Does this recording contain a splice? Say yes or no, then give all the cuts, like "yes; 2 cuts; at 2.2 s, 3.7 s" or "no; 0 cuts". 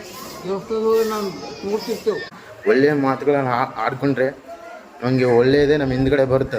yes; 1 cut; at 2.3 s